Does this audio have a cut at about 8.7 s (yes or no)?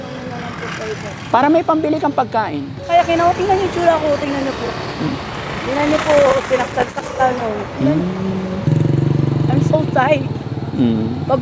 yes